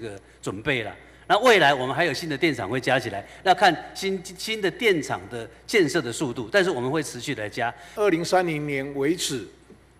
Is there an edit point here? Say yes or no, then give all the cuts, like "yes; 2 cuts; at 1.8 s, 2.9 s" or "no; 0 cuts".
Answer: yes; 1 cut; at 7.8 s